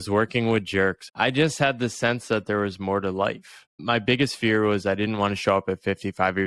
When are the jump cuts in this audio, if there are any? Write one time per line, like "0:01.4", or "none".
0:01.0
0:03.7